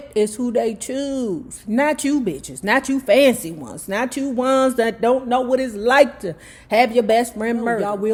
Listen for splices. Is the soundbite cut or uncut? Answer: uncut